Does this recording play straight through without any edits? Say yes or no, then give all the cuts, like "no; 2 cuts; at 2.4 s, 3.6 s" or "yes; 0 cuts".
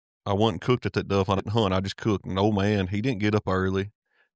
no; 1 cut; at 1.4 s